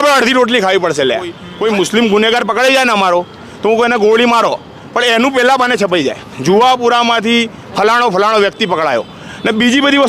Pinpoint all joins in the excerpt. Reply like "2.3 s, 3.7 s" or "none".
1.4 s

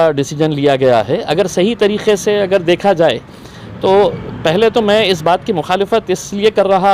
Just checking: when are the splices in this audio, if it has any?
none

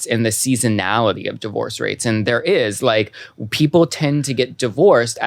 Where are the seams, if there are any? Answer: none

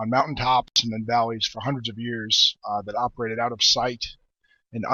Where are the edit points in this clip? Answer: none

